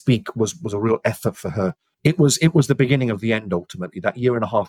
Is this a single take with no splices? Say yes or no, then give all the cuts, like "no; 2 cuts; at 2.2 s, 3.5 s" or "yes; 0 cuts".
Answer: no; 1 cut; at 1.9 s